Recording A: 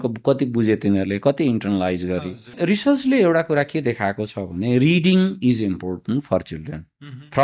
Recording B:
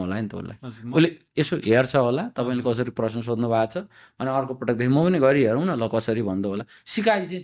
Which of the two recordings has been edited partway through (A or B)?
A